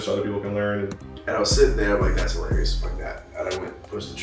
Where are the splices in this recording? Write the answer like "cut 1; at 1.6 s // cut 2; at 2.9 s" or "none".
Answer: cut 1; at 1.1 s